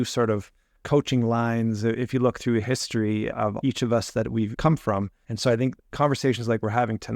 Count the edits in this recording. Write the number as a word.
three